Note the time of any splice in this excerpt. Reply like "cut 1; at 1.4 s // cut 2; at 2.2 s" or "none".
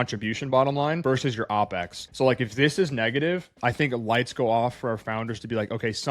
cut 1; at 1.5 s // cut 2; at 3.5 s